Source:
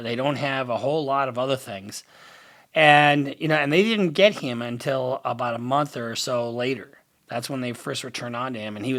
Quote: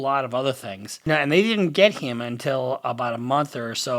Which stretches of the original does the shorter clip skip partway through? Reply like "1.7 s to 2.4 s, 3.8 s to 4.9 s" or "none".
2.0 s to 3.4 s